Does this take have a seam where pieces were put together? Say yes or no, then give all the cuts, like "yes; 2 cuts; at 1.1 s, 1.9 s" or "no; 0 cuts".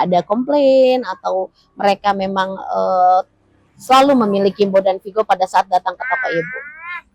no; 0 cuts